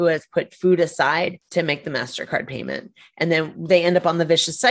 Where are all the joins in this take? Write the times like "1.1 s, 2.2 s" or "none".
1.4 s